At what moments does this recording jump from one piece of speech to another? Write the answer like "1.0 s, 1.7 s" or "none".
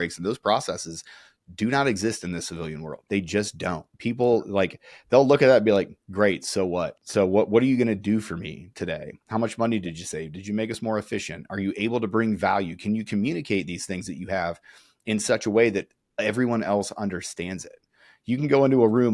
2.9 s, 7.0 s

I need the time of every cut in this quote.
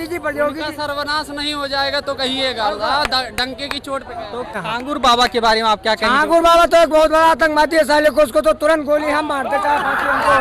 4.5 s

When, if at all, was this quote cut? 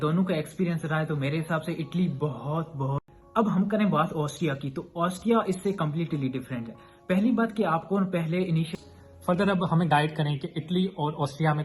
3.0 s, 8.7 s

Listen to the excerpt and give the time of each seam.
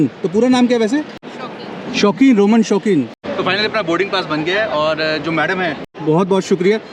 none

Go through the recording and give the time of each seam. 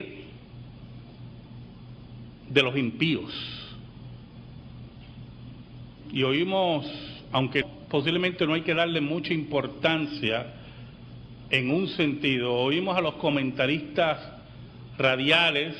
3.1 s

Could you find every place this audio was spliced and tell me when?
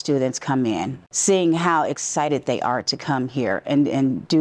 1.0 s

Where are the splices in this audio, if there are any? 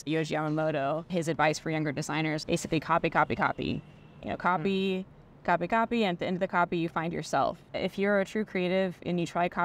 1.1 s, 2.4 s, 7.7 s

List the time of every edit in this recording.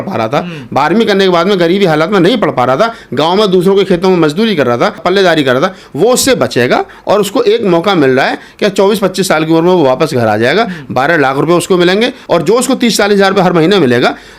5.0 s, 12.2 s

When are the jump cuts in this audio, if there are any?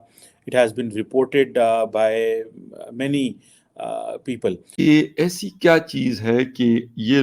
4.7 s

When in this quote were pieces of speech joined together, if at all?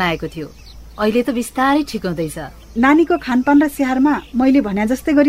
2.7 s

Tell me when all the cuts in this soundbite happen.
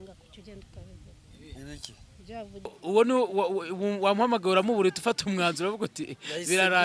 2.8 s

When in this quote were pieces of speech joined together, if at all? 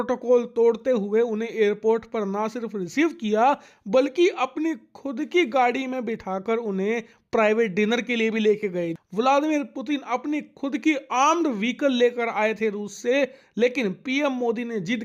8.9 s

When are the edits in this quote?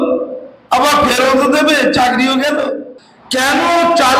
2.9 s

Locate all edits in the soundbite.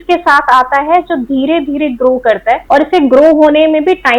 2.6 s

